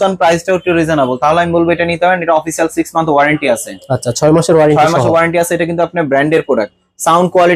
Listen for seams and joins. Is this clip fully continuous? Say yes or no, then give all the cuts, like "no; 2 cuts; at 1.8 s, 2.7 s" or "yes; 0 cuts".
yes; 0 cuts